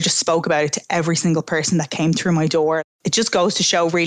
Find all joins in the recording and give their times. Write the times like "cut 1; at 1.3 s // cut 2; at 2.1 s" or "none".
cut 1; at 2.8 s